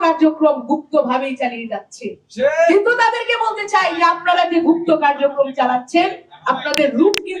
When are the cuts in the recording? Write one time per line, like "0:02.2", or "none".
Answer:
none